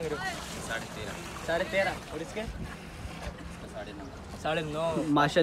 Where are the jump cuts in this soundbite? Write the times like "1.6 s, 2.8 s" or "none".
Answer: none